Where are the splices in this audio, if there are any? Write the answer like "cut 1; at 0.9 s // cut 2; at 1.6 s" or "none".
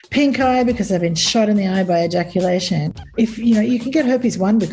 cut 1; at 2.9 s